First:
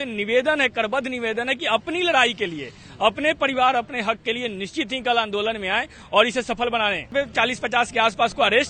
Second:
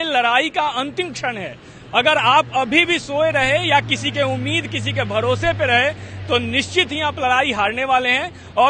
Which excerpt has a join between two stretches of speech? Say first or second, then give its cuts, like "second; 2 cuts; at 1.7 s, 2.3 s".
first; 1 cut; at 7.1 s